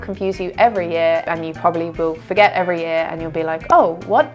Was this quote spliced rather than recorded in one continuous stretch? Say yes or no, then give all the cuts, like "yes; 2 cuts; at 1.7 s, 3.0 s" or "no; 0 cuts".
yes; 1 cut; at 1.2 s